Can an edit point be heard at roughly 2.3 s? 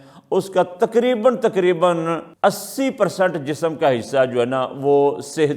yes; 1 cut; at 2.3 s

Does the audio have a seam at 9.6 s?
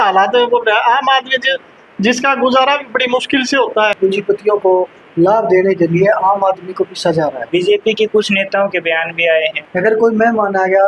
yes; 3 cuts; at 4.0 s, 7.4 s, 9.6 s

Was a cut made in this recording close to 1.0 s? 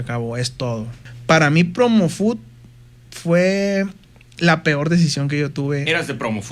yes; 1 cut; at 1.0 s

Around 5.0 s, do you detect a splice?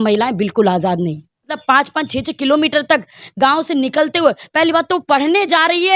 no; 1 cut; at 1.6 s

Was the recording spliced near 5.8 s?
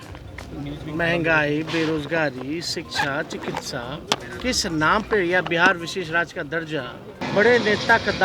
no; 1 cut; at 7.2 s

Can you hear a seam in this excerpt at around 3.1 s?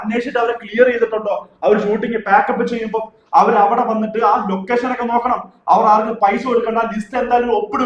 no; 0 cuts

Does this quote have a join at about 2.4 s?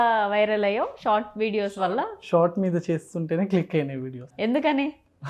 no; 1 cut; at 4.2 s

